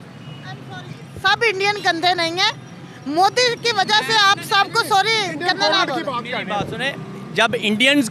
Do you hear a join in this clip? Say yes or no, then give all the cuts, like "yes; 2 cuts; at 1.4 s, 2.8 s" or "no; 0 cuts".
no; 0 cuts